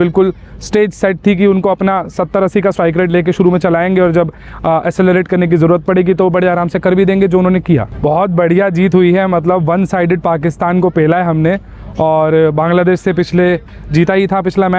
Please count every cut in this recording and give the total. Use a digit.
1